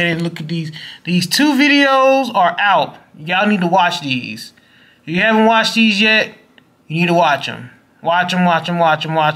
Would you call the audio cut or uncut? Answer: uncut